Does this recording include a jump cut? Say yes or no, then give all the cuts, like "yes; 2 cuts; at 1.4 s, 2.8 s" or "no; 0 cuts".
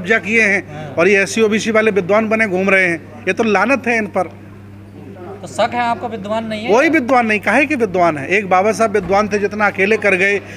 no; 0 cuts